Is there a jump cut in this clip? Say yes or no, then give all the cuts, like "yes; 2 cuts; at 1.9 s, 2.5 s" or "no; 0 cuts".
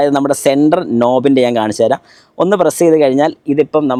no; 0 cuts